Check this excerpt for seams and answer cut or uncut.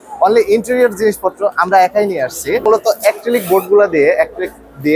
cut